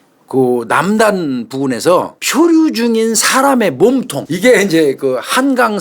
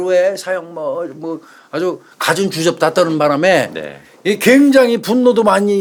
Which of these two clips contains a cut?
first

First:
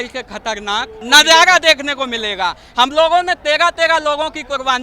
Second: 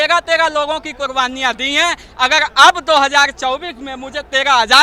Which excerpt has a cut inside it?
first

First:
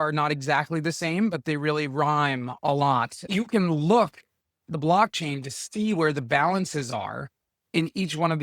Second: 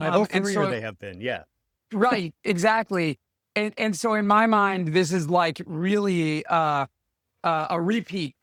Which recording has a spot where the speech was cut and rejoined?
first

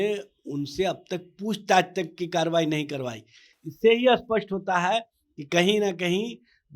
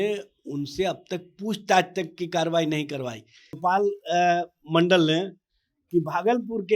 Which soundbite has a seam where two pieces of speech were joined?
second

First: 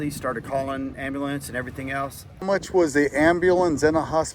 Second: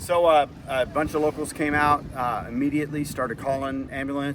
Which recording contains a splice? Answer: first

